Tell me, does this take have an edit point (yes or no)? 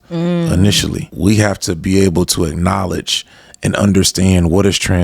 yes